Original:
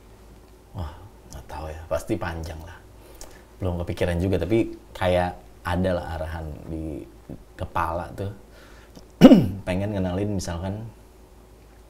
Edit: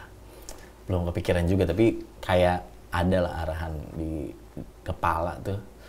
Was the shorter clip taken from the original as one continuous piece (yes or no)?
yes